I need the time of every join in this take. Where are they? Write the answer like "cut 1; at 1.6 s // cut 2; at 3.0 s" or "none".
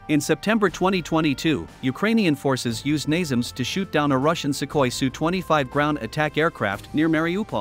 none